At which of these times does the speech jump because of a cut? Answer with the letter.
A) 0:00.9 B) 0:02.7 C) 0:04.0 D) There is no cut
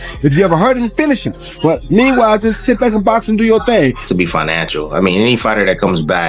C